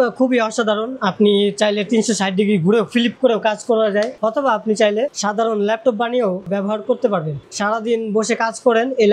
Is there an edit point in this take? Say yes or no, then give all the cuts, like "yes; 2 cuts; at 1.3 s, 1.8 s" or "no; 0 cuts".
yes; 3 cuts; at 4.1 s, 5.2 s, 7.5 s